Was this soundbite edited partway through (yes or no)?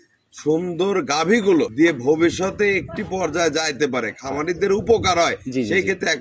yes